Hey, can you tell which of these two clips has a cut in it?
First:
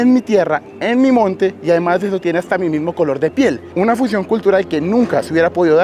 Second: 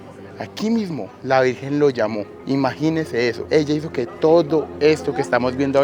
second; 1 cut; at 3.4 s

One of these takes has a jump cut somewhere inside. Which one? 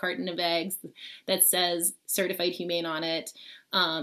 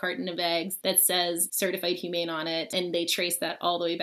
second; 2 cuts; at 1.3 s, 2.7 s

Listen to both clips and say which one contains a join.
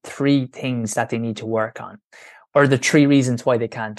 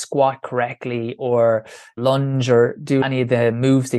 second; 2 cuts; at 2.0 s, 3.0 s

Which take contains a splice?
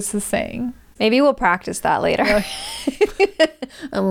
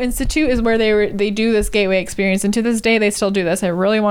first; 1 cut; at 0.9 s

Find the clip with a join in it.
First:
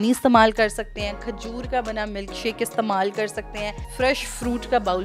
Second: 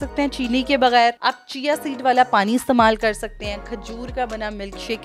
first; 1 cut; at 3.9 s

